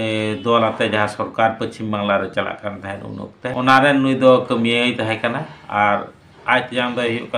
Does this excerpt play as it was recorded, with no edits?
yes; 0 cuts

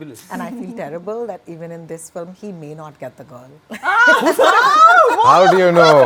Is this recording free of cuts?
yes; 0 cuts

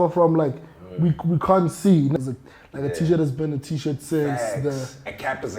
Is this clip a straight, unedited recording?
no; 1 cut; at 2.2 s

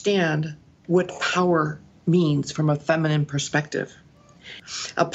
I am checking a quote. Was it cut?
yes; 1 cut; at 4.1 s

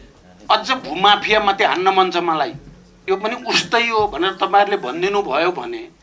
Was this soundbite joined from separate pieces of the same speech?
yes; 1 cut; at 3.0 s

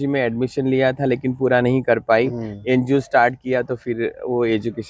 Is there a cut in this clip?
no; 0 cuts

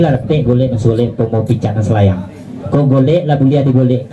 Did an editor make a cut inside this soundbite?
yes; 1 cut; at 2.3 s

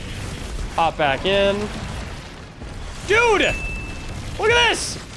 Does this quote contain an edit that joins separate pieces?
no; 0 cuts

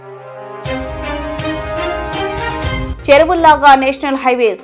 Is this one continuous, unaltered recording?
no; 1 cut; at 2.9 s

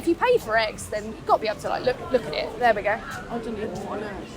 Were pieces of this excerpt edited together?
yes; 1 cut; at 2.6 s

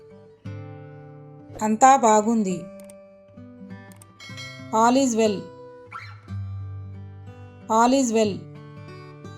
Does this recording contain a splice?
yes; 6 cuts; at 1.5 s, 2.6 s, 4.5 s, 5.4 s, 7.5 s, 8.4 s

